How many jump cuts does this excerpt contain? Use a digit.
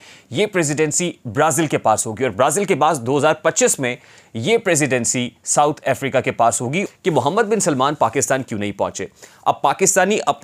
1